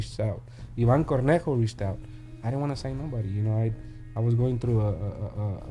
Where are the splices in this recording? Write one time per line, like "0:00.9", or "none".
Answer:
none